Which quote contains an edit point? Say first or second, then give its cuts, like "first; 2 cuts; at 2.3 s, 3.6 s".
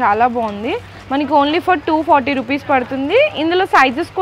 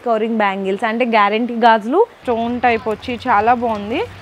second; 1 cut; at 2.2 s